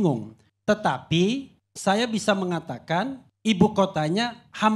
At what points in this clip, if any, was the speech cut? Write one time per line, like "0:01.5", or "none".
none